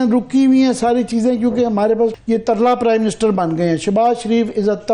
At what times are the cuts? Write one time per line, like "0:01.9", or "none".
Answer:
0:02.1